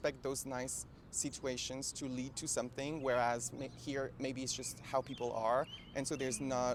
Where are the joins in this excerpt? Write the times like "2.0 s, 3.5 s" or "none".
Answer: none